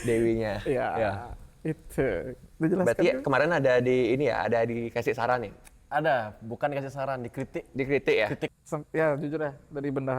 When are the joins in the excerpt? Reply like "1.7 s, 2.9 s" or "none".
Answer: 8.5 s